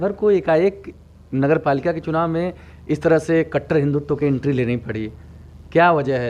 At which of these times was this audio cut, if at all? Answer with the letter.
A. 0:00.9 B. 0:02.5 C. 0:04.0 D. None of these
D